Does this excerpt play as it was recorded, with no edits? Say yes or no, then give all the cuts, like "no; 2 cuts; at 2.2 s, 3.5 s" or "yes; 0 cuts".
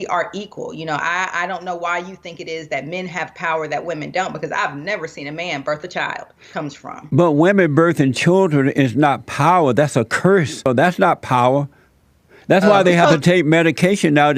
no; 2 cuts; at 6.4 s, 10.7 s